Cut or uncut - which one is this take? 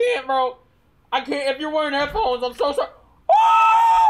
uncut